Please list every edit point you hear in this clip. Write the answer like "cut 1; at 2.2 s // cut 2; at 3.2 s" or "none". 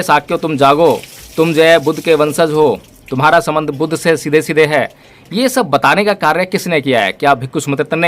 none